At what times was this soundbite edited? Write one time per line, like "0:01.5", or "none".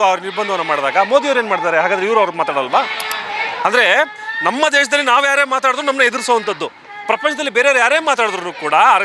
none